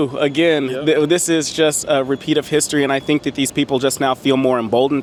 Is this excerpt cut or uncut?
uncut